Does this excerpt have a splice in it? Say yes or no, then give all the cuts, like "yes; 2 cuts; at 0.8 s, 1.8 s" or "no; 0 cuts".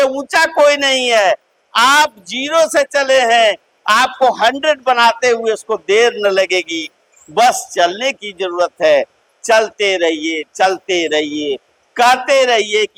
no; 0 cuts